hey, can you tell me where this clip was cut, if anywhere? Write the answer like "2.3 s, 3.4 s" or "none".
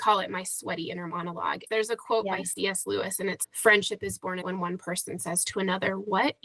1.6 s, 3.4 s, 4.4 s